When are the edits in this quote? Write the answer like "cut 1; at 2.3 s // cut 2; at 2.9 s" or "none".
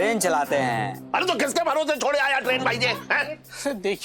none